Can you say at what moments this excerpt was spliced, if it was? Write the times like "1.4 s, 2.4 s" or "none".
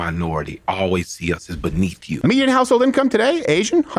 2.1 s